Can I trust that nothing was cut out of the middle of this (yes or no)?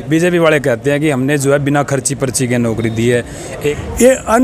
no